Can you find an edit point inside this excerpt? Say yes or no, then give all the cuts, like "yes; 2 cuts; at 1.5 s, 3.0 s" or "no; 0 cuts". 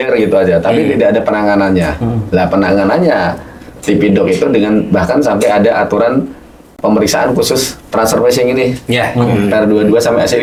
no; 0 cuts